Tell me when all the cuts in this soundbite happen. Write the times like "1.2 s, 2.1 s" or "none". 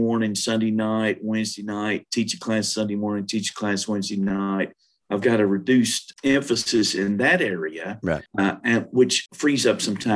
6.0 s, 8.3 s, 9.2 s